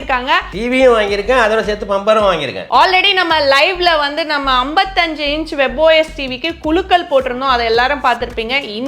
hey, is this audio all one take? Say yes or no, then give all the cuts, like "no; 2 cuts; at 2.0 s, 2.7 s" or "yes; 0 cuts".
no; 1 cut; at 2.6 s